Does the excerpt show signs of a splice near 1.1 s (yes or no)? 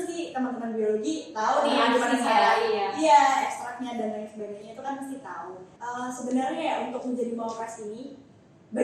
no